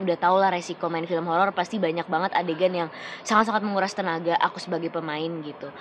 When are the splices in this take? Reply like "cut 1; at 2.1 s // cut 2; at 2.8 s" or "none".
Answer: none